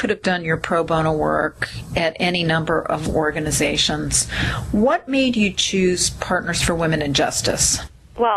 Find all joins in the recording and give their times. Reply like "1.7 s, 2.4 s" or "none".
5.5 s